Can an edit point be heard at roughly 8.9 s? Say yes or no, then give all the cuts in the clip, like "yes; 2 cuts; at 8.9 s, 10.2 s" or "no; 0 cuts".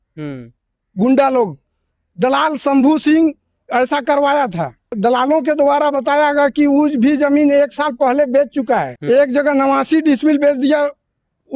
yes; 2 cuts; at 4.9 s, 8.9 s